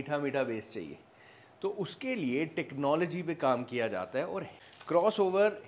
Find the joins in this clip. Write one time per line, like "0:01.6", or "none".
0:04.6